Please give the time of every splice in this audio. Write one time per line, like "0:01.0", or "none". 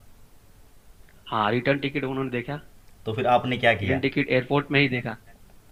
none